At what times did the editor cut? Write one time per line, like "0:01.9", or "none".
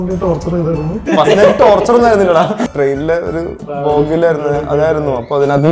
0:01.0
0:02.7